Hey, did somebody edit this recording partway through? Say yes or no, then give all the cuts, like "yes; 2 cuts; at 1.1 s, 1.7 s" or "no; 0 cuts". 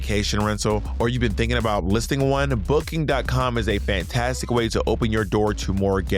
no; 0 cuts